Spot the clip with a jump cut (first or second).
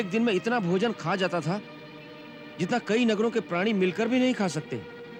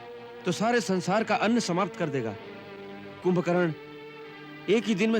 second